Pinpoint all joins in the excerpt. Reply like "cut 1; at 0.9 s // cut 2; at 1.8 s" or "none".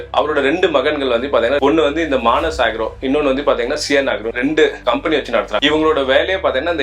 cut 1; at 1.6 s // cut 2; at 4.4 s // cut 3; at 5.6 s